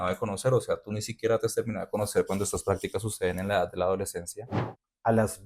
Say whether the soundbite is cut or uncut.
cut